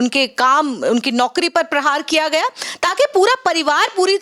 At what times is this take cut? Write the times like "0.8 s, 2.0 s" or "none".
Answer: none